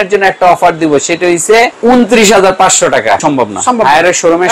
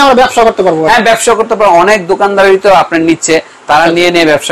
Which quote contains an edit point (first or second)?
first